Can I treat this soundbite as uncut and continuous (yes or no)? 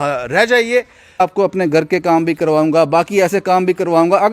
no